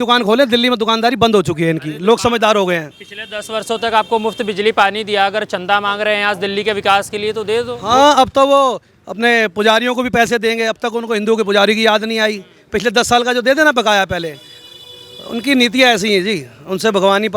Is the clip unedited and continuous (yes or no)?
yes